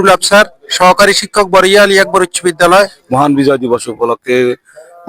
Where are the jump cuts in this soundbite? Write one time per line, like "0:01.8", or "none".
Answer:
0:03.0